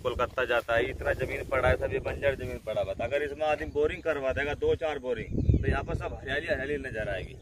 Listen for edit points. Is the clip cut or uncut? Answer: uncut